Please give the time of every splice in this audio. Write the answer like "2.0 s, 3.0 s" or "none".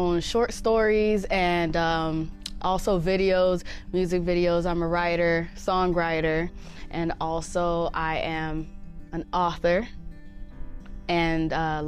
none